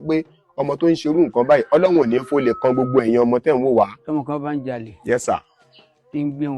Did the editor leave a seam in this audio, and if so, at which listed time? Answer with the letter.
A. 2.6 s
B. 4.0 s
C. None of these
B